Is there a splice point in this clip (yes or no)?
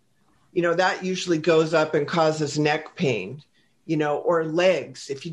no